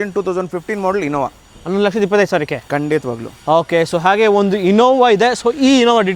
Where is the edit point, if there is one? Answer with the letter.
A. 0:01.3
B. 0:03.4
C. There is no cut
C